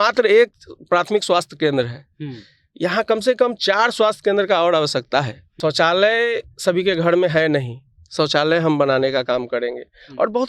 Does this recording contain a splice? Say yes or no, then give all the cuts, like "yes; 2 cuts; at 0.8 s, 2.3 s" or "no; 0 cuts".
yes; 1 cut; at 5.4 s